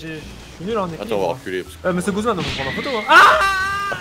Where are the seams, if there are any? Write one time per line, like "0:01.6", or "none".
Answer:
0:01.7

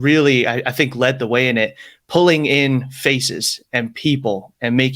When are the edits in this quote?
none

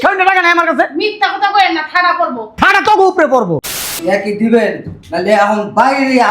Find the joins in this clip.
0:03.8

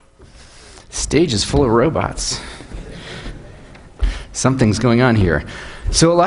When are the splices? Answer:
none

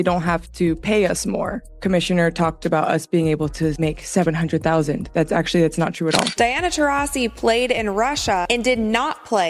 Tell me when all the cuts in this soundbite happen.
0:01.8
0:06.3

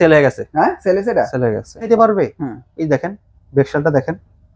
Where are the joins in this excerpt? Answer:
0:01.9

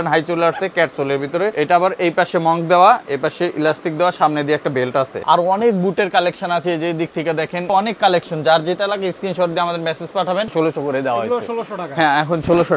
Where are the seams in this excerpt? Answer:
0:01.5
0:05.2
0:07.7
0:10.5

